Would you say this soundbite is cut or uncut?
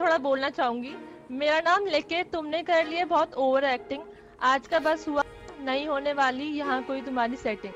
uncut